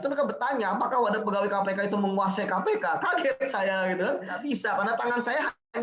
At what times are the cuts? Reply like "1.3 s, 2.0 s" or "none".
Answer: 4.3 s